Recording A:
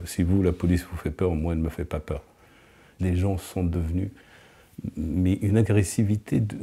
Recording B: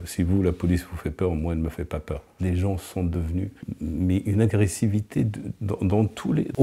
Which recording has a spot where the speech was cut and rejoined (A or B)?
B